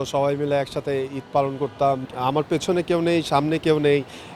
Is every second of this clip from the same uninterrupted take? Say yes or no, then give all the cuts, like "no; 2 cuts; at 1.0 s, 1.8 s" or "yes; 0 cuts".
no; 1 cut; at 2.0 s